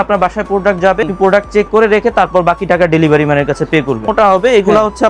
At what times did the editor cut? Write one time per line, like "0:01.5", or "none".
0:01.1
0:04.1